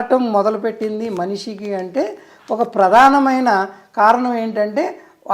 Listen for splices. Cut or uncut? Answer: uncut